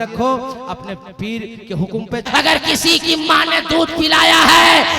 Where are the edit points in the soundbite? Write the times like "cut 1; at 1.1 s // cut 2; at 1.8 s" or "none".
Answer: cut 1; at 2.2 s

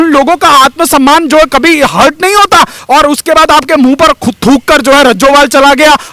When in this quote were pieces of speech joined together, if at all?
cut 1; at 2.8 s

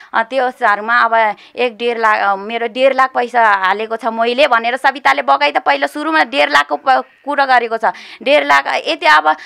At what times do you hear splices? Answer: none

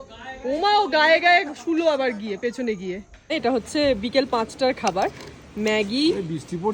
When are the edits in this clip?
cut 1; at 3.3 s

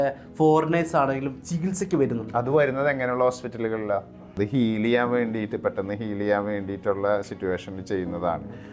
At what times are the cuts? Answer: cut 1; at 4.2 s

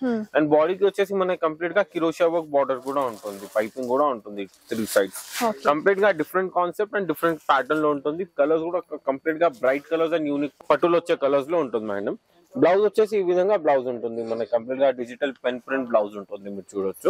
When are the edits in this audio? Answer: none

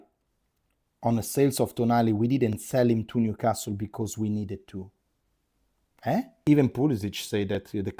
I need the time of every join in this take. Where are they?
cut 1; at 6.3 s

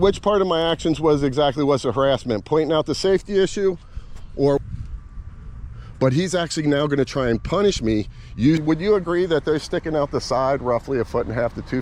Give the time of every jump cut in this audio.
cut 1; at 4.6 s // cut 2; at 8.6 s

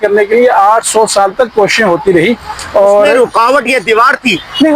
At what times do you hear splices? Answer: none

